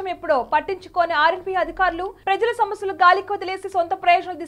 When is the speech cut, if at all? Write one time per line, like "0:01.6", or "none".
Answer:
none